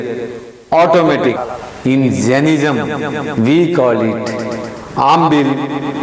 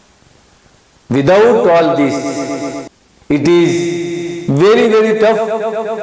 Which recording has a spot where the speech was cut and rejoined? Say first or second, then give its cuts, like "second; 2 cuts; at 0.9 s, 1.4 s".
first; 1 cut; at 1.4 s